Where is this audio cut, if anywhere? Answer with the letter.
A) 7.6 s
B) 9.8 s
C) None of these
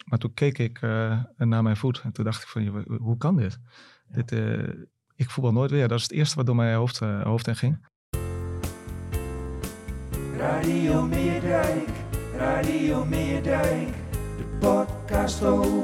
A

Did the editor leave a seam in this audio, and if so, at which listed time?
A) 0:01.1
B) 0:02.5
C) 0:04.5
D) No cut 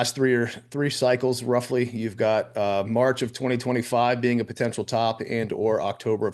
D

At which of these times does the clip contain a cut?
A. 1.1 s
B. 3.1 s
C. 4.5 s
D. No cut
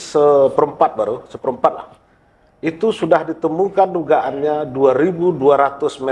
D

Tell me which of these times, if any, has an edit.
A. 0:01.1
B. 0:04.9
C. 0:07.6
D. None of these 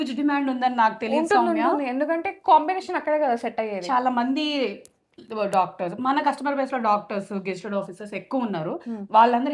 D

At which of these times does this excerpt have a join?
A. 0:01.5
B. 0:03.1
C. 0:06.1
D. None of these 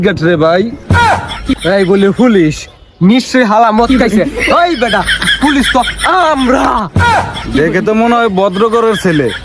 A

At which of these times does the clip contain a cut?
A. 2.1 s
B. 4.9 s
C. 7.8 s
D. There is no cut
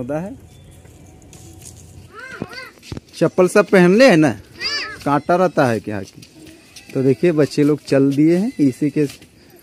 A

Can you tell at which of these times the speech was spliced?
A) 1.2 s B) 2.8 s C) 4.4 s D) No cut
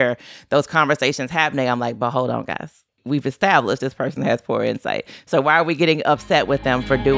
B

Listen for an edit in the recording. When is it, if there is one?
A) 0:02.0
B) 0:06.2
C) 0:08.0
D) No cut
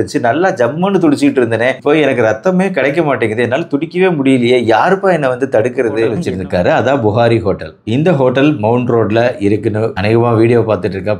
B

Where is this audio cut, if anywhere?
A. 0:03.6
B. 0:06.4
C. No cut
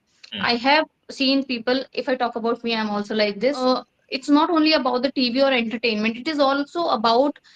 A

